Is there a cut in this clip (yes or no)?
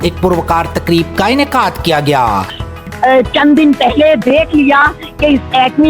yes